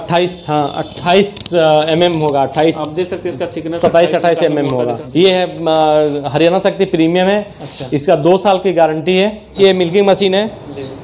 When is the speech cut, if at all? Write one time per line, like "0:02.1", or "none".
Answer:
0:05.0
0:09.6